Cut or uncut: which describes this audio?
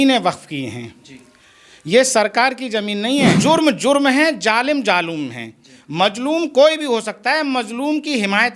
cut